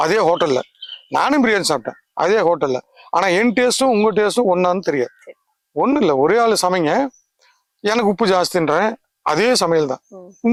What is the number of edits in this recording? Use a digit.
0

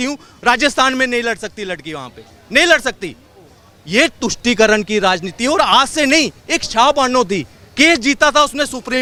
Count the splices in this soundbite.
0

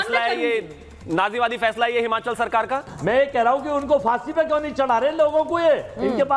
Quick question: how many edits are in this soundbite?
1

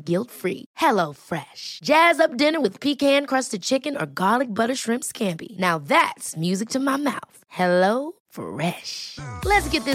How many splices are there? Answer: 0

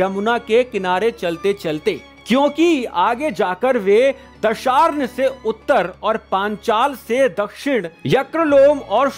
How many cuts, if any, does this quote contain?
0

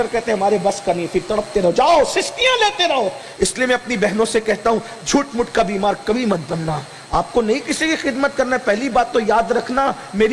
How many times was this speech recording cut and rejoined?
0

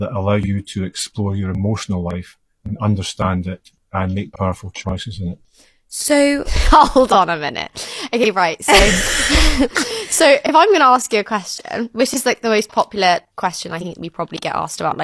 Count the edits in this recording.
1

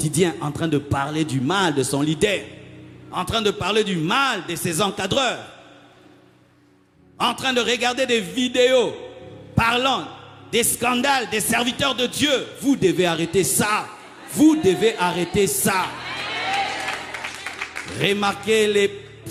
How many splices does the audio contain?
0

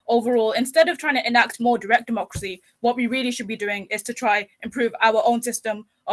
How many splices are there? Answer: 0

